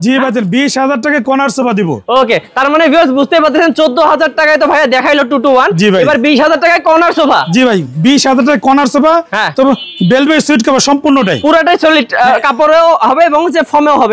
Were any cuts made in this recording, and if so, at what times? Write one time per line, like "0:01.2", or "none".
none

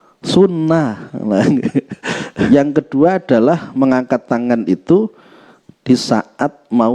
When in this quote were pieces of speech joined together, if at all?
0:02.5

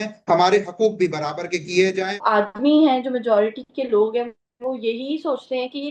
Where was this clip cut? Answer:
0:02.2

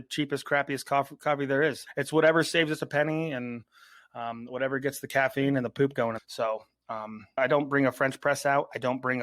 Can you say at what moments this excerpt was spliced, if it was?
0:01.8

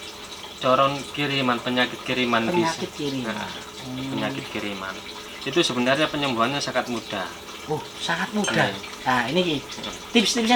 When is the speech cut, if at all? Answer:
none

